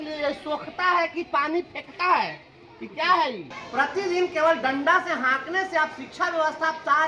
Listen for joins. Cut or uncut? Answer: cut